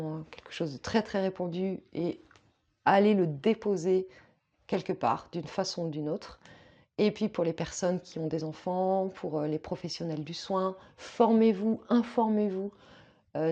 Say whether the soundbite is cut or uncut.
uncut